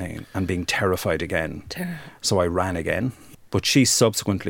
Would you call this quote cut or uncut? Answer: cut